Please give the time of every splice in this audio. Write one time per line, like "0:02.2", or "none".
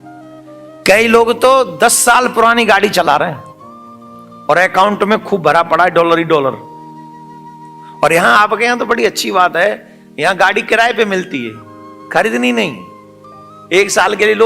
none